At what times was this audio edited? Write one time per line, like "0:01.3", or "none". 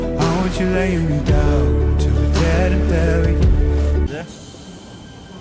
0:04.1

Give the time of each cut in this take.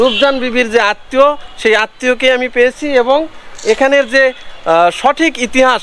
none

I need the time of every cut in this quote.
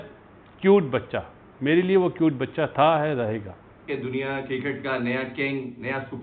0:03.9

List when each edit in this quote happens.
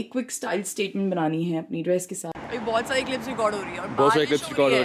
0:02.3

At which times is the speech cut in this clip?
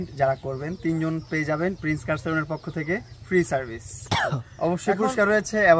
0:04.1

